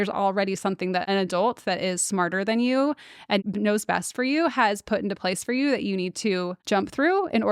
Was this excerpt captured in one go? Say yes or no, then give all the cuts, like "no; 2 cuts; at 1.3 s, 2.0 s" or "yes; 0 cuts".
no; 3 cuts; at 1.0 s, 3.4 s, 6.6 s